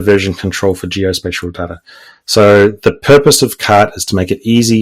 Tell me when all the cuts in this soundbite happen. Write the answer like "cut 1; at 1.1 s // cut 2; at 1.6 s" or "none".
none